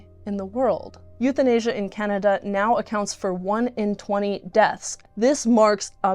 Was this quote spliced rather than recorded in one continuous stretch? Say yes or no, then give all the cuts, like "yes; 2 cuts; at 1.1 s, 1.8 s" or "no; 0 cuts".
yes; 2 cuts; at 1.0 s, 5.0 s